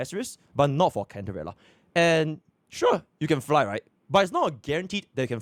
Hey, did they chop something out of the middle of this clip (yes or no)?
no